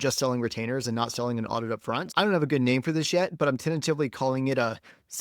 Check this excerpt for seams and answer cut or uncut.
cut